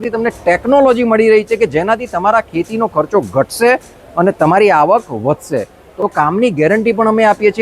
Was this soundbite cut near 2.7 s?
no; 1 cut; at 5.9 s

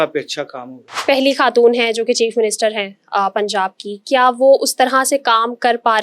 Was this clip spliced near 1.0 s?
yes; 1 cut; at 1.0 s

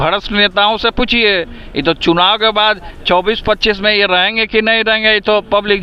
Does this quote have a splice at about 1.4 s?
no; 0 cuts

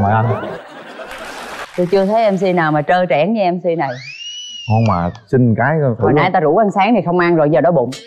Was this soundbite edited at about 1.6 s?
yes; 1 cut; at 1.6 s

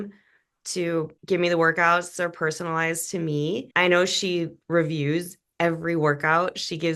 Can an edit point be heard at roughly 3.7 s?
no; 0 cuts

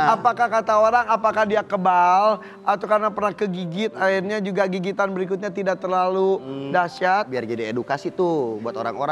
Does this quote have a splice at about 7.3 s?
yes; 1 cut; at 7.3 s

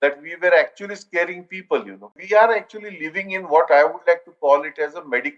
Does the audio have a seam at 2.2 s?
yes; 1 cut; at 2.2 s

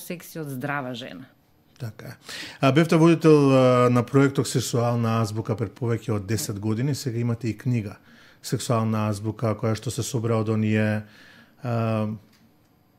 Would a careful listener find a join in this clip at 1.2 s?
no; 0 cuts

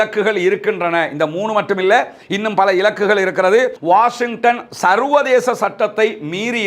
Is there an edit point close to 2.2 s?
no; 1 cut; at 3.8 s

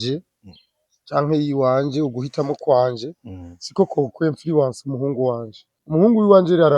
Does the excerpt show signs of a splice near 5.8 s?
yes; 1 cut; at 5.8 s

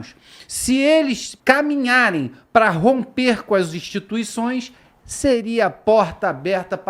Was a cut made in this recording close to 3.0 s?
no; 1 cut; at 1.3 s

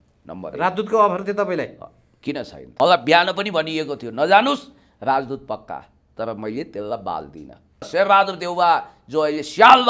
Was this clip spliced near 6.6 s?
no; 2 cuts; at 2.6 s, 7.9 s

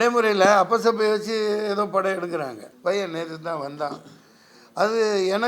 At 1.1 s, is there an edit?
no; 1 cut; at 2.6 s

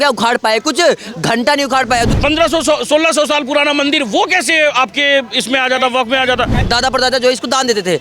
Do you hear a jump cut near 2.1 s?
yes; 2 cuts; at 2.1 s, 6.6 s

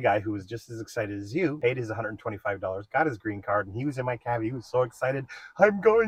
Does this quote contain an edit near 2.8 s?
no; 0 cuts

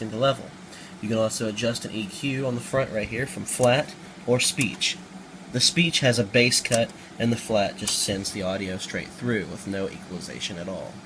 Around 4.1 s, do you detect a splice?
no; 1 cut; at 6.1 s

